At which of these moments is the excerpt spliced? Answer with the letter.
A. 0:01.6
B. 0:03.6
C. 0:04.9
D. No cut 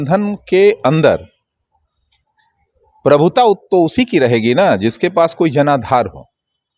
D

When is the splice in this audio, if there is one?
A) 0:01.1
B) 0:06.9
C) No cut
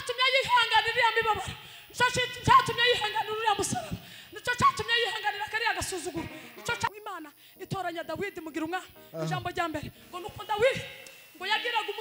B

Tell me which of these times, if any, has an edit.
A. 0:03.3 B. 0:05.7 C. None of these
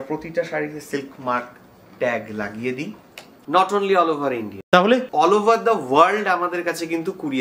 A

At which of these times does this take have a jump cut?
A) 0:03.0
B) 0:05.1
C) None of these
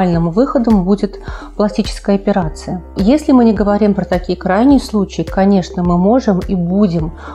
A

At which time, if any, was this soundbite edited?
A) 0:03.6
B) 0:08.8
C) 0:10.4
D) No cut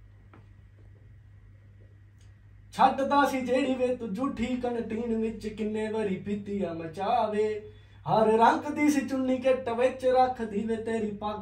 D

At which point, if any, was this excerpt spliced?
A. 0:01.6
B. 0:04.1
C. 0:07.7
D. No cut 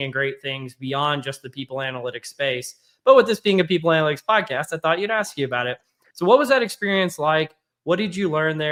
D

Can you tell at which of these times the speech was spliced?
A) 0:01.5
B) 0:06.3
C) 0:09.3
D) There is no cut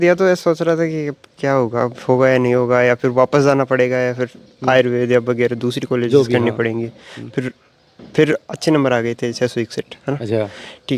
D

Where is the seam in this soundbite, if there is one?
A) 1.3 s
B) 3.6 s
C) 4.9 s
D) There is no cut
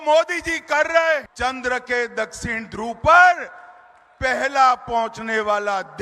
A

